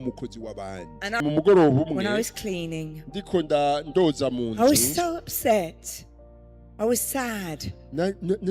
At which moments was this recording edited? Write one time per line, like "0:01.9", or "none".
0:01.2